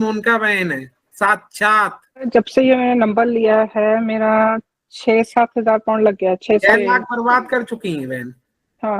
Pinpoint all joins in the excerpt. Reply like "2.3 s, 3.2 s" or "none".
2.2 s, 6.6 s